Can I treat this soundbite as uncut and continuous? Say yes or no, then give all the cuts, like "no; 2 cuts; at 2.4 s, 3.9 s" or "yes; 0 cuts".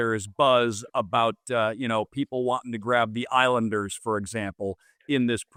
yes; 0 cuts